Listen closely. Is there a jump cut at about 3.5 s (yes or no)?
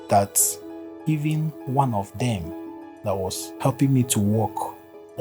yes